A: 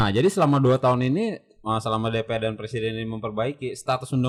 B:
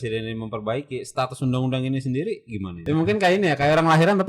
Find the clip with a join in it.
B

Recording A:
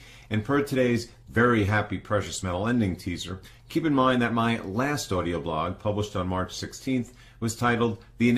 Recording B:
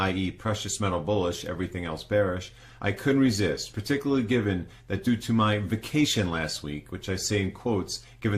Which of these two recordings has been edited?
B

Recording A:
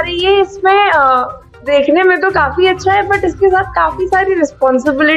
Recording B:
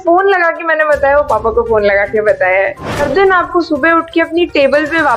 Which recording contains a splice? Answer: B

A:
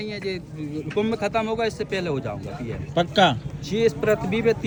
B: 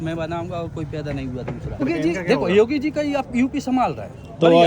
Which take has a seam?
B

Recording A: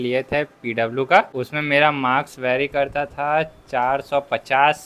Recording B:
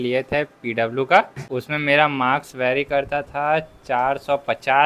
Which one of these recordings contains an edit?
A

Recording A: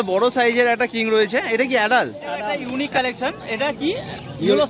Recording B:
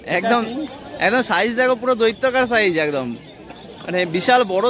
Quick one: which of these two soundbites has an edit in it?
A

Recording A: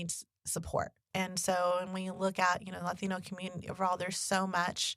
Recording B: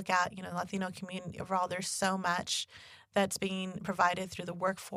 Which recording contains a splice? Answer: A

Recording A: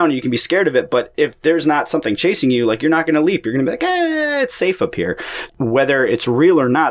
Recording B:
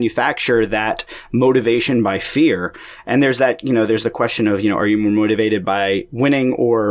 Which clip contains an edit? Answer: A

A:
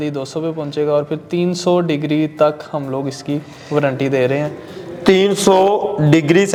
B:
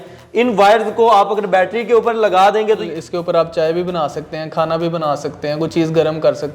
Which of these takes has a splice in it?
B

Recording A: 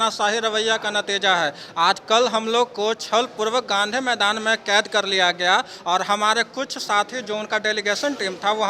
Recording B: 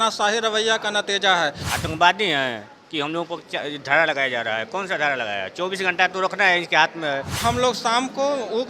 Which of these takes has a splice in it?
B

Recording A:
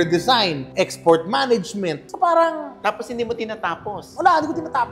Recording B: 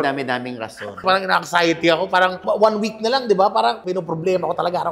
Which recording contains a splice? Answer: B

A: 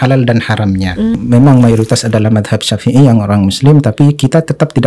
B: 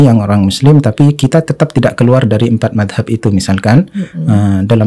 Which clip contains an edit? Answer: A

